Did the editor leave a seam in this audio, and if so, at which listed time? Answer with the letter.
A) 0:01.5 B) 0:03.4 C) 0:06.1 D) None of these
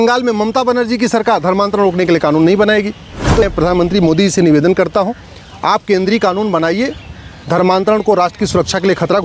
B